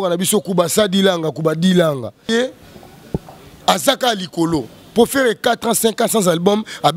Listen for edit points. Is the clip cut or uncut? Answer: cut